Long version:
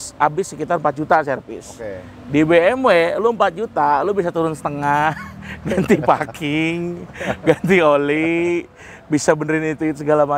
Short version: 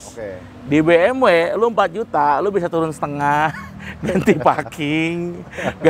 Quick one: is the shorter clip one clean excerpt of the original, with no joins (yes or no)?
yes